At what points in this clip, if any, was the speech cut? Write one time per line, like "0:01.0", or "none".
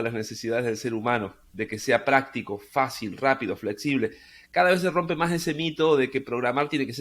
none